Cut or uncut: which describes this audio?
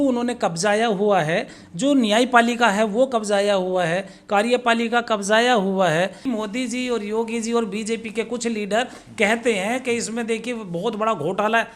cut